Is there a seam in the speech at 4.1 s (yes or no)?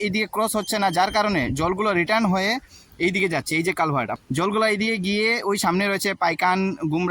yes